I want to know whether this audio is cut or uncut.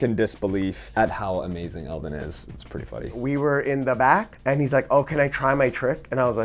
cut